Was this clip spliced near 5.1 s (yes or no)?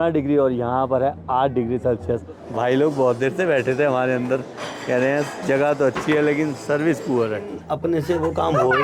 no